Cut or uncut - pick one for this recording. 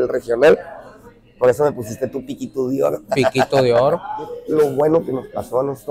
cut